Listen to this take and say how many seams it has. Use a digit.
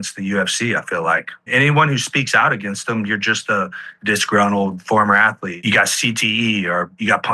2